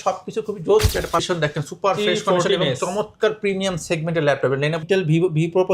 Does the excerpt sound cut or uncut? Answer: cut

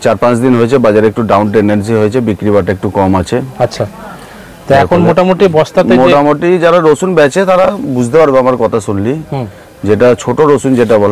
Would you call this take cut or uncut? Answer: uncut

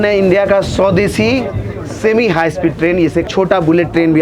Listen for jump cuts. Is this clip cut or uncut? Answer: cut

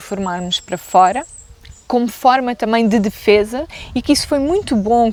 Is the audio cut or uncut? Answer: uncut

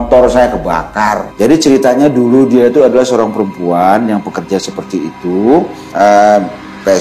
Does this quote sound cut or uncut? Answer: cut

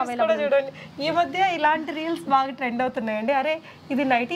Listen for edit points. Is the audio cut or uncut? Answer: uncut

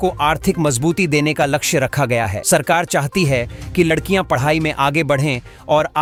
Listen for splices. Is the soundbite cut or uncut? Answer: uncut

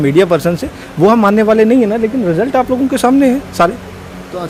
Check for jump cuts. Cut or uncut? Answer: uncut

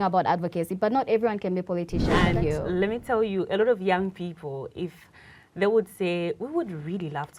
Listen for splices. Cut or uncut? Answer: cut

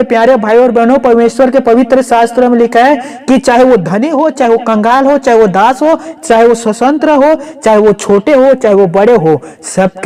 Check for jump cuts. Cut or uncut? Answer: uncut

